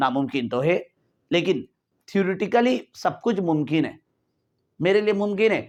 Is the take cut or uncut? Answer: uncut